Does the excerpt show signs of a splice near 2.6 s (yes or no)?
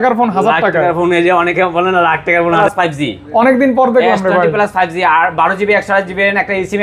yes